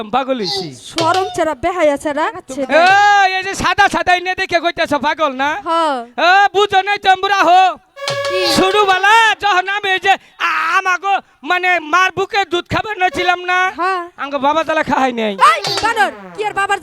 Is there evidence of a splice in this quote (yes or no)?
yes